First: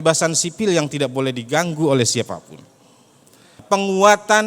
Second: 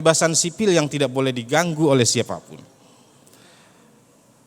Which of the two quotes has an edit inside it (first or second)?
first